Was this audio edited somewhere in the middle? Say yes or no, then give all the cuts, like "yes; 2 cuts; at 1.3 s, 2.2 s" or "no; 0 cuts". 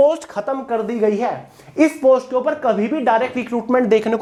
no; 0 cuts